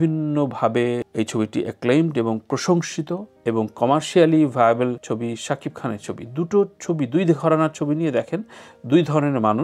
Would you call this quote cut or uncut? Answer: uncut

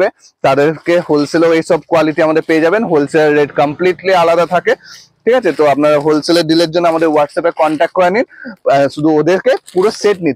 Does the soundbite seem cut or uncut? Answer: uncut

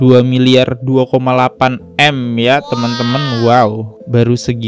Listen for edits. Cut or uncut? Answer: uncut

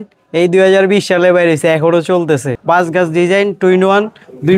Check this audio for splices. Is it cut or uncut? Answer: cut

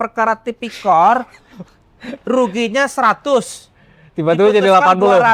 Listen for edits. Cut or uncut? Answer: uncut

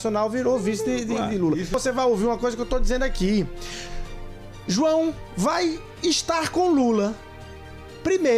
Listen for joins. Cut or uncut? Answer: cut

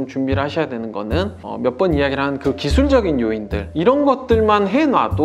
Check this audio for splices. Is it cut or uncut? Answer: cut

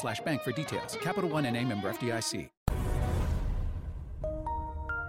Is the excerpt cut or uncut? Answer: cut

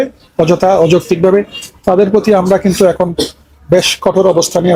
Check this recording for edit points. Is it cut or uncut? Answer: uncut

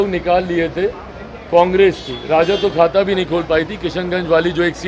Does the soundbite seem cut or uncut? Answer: uncut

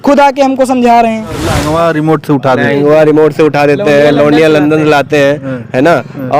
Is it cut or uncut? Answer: cut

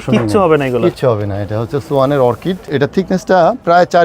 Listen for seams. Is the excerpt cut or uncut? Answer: cut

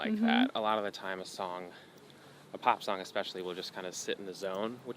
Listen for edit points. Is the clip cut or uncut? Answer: uncut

